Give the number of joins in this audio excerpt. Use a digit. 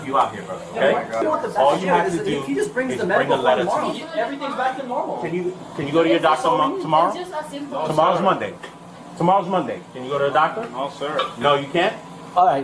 1